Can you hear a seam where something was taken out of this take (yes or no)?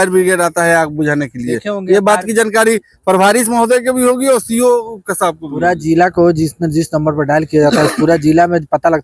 no